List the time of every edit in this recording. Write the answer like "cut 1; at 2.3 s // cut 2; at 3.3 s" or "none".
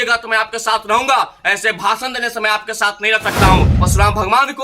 cut 1; at 3.7 s